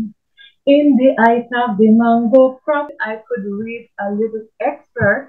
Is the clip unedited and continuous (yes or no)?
no